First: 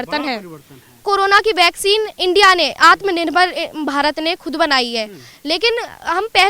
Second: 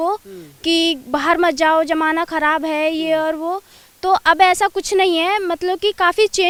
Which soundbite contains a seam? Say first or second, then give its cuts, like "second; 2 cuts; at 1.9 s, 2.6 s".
first; 1 cut; at 1.0 s